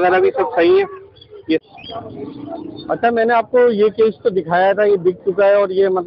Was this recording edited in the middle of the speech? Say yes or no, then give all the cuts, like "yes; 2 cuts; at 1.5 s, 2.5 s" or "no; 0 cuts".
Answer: yes; 1 cut; at 1.6 s